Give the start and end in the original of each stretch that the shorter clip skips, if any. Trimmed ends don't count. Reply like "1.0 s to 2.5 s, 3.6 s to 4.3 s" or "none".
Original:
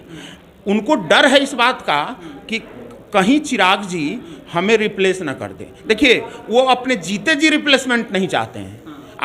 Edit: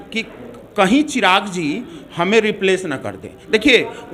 none